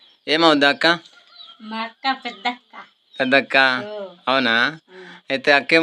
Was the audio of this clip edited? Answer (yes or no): no